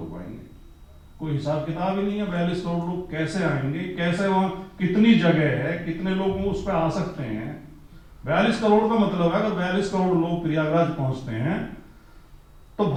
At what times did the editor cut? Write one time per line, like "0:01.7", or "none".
none